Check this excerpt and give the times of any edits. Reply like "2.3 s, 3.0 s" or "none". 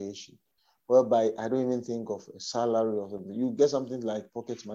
none